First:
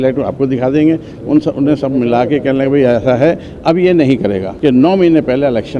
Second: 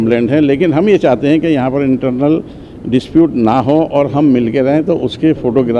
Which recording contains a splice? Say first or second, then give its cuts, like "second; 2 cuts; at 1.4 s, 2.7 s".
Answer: first; 1 cut; at 4.5 s